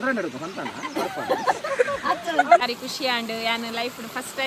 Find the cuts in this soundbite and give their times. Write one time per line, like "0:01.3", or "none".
0:02.6

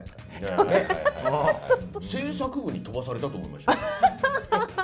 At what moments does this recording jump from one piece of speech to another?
0:01.9

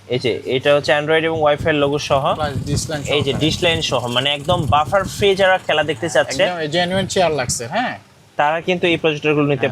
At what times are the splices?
none

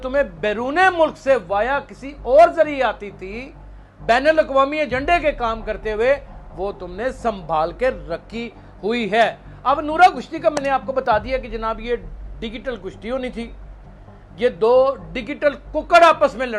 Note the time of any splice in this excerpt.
none

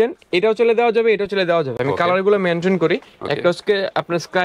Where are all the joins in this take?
none

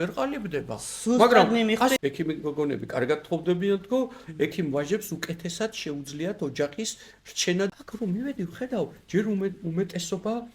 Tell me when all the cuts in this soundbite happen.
0:02.0
0:07.7

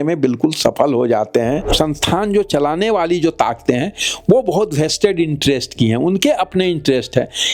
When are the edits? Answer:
0:01.7

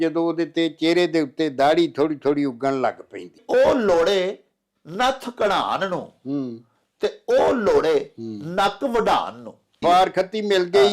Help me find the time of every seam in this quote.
0:03.4
0:09.8

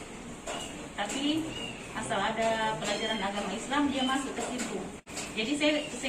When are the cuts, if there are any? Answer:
0:05.1

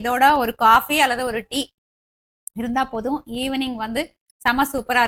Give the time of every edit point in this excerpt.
none

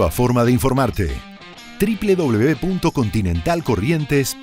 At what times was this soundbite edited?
0:03.2

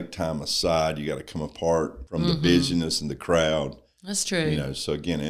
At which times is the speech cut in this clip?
0:02.0

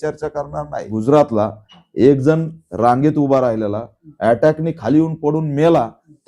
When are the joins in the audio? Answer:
0:00.9

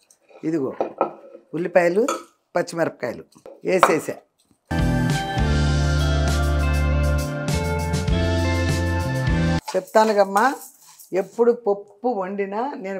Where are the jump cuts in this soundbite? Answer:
none

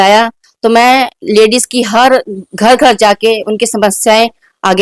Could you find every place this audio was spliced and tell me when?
none

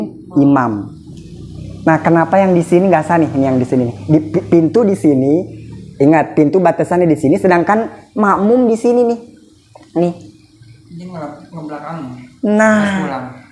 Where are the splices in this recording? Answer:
none

